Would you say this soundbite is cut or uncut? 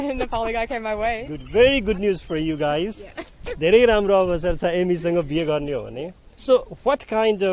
cut